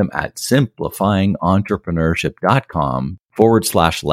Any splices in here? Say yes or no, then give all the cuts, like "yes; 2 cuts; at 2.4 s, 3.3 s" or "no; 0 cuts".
yes; 1 cut; at 3.2 s